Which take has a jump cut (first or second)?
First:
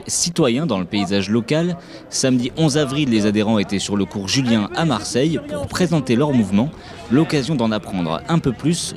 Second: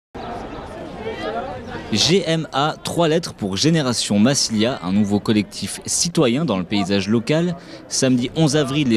first